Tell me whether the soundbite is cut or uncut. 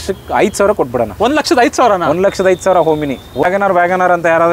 cut